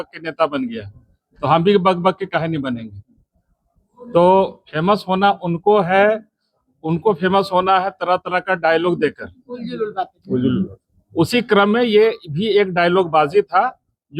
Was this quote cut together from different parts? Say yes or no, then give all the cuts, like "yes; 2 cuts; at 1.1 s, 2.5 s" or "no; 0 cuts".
no; 0 cuts